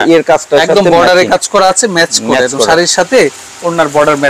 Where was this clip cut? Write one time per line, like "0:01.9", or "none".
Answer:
none